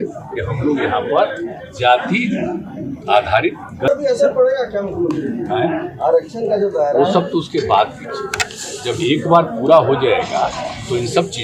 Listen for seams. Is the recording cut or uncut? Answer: cut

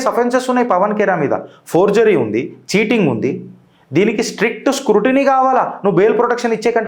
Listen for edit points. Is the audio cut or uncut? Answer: uncut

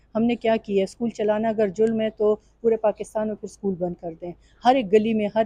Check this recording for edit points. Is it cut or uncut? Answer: uncut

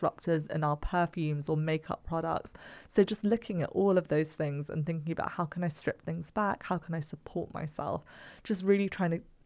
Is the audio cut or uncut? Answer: uncut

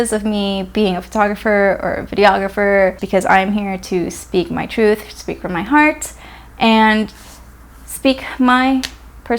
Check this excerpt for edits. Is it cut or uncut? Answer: cut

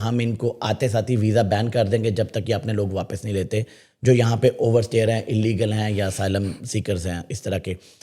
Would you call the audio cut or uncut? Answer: uncut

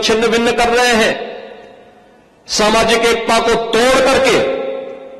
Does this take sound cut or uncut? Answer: uncut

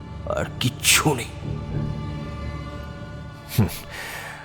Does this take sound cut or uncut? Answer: cut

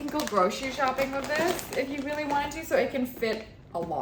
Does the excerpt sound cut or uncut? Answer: uncut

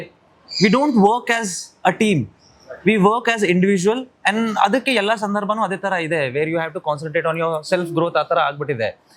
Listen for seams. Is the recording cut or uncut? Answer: uncut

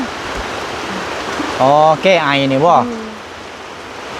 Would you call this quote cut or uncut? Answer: uncut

